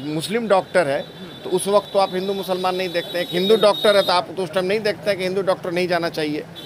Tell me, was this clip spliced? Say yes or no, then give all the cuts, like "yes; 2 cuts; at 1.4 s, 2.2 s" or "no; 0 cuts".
no; 0 cuts